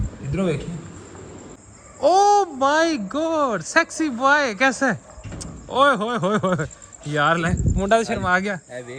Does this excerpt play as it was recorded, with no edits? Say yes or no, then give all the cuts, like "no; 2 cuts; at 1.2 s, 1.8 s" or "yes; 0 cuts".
no; 1 cut; at 1.6 s